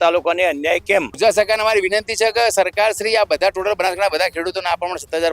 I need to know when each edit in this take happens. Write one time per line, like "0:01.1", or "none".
0:01.1